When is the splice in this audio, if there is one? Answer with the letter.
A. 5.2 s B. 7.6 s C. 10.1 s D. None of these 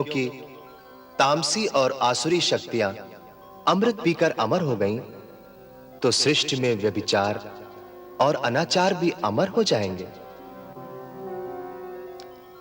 D